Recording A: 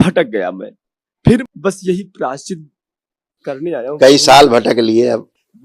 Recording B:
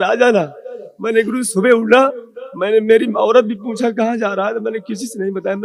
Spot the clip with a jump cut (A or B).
A